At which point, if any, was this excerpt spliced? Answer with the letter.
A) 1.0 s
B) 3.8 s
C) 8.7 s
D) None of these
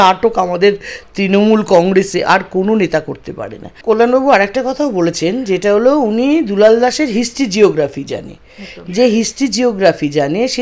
B